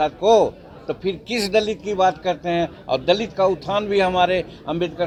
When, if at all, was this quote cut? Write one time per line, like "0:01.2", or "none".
none